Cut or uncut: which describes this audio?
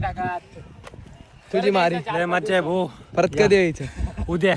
uncut